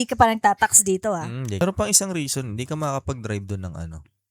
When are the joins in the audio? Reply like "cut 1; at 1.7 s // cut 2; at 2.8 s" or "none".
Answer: cut 1; at 1.6 s